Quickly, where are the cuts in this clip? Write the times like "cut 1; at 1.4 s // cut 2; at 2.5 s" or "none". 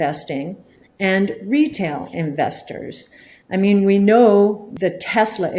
cut 1; at 4.7 s

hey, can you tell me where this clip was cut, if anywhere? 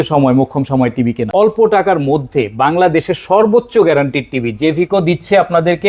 cut 1; at 1.2 s

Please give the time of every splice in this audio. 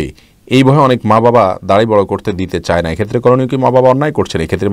none

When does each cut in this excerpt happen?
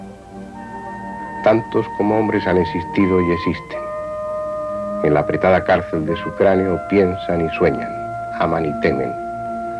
none

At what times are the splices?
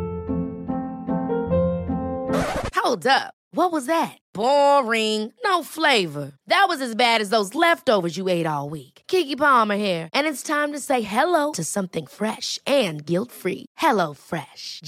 none

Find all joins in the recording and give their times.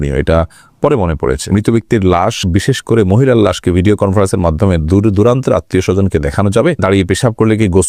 cut 1; at 1.5 s // cut 2; at 6.8 s

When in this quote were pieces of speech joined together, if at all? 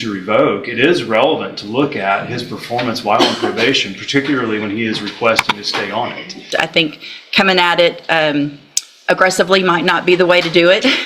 cut 1; at 6.4 s

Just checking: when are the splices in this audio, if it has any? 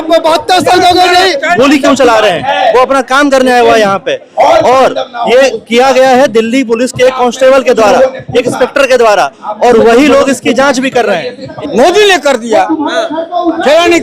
cut 1; at 1.5 s // cut 2; at 11.5 s

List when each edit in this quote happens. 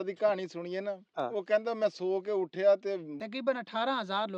cut 1; at 3.1 s

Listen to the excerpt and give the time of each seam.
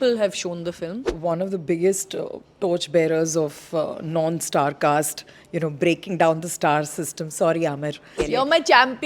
cut 1; at 1.0 s // cut 2; at 8.1 s

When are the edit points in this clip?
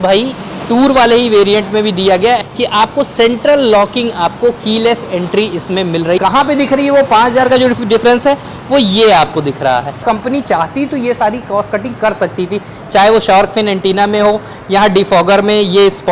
cut 1; at 2.4 s // cut 2; at 6.2 s // cut 3; at 10.0 s

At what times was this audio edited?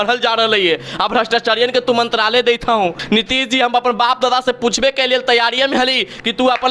cut 1; at 3.0 s

